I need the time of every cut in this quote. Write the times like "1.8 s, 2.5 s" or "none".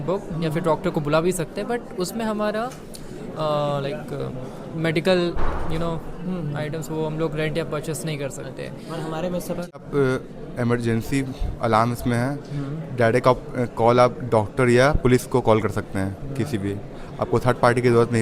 9.8 s